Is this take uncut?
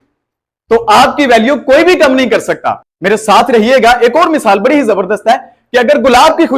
no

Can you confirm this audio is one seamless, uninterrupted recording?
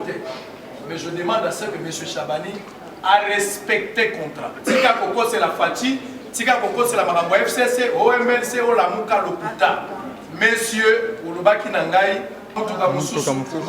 no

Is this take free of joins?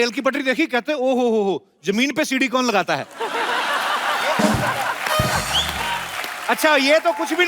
yes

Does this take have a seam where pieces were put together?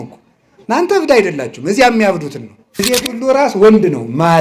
yes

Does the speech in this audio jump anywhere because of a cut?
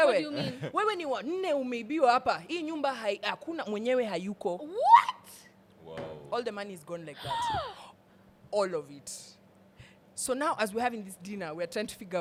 no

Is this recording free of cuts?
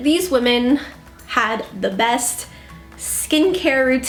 yes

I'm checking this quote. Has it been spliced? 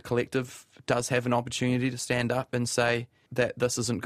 yes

